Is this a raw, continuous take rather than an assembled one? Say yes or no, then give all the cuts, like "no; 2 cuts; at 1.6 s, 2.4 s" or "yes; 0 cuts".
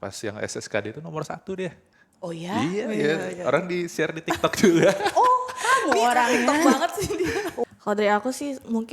no; 1 cut; at 7.6 s